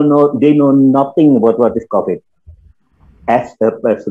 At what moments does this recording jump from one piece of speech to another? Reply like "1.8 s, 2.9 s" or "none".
none